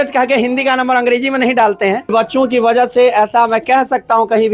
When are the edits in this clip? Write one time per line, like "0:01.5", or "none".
0:02.1